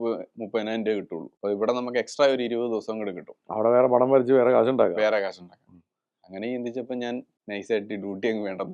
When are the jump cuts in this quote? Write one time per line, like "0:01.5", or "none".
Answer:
0:01.2
0:07.3